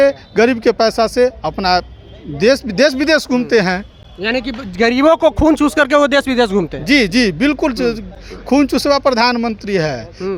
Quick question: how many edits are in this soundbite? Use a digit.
0